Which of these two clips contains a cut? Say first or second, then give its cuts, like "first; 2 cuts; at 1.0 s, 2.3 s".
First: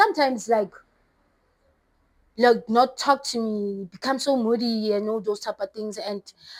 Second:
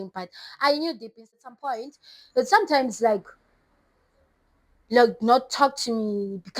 second; 1 cut; at 1.4 s